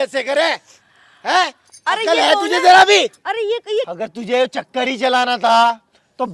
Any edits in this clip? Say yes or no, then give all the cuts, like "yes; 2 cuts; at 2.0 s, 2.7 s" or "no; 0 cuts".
yes; 1 cut; at 3.9 s